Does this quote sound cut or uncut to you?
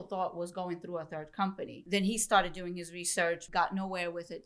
cut